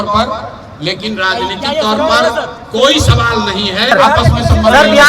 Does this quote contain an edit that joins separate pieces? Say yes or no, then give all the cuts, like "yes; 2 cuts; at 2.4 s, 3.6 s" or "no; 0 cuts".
yes; 1 cut; at 3.9 s